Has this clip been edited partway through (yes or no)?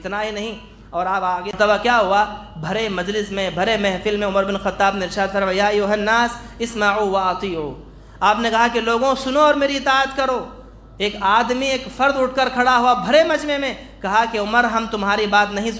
yes